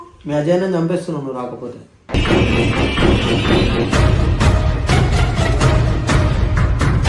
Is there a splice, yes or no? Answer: no